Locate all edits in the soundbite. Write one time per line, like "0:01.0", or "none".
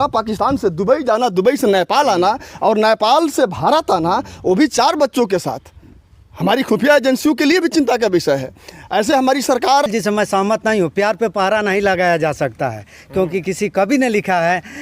0:09.8